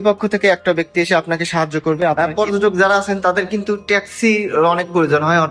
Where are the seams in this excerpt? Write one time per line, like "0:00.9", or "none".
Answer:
0:02.2